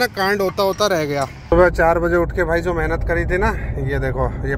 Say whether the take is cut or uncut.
cut